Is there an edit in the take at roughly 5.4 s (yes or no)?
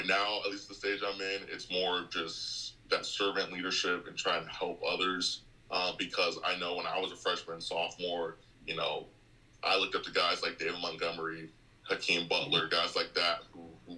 no